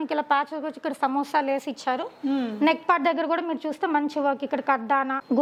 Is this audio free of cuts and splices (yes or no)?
yes